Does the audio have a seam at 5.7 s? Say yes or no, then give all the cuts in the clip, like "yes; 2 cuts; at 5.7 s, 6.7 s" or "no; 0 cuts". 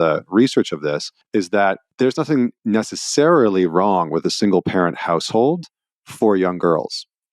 no; 2 cuts; at 1.1 s, 2.5 s